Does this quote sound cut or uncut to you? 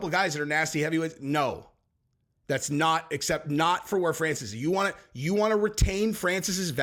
uncut